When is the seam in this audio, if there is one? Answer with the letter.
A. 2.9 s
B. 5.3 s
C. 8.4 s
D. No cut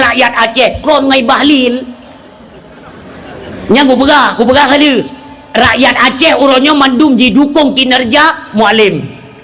D